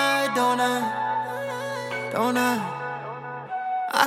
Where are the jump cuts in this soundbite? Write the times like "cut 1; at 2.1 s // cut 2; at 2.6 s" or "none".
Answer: none

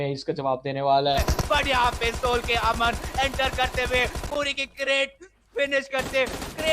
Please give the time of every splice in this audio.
cut 1; at 1.0 s

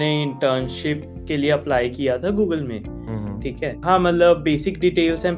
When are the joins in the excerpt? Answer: none

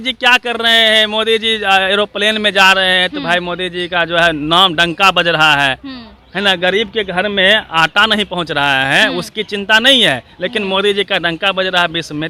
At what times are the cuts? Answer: none

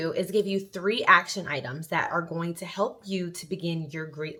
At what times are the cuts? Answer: none

